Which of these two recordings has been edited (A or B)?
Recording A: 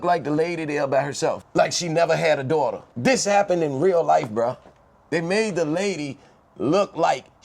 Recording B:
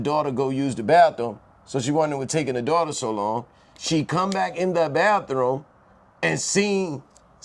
A